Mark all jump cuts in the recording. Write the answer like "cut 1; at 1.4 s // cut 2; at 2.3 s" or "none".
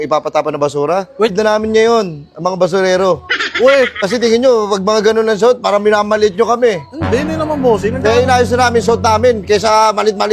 cut 1; at 1.3 s